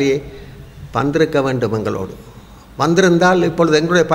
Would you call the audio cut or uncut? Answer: uncut